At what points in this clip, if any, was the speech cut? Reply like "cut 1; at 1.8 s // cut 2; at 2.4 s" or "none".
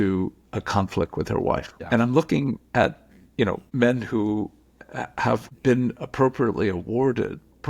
cut 1; at 1.7 s // cut 2; at 3.7 s // cut 3; at 5.5 s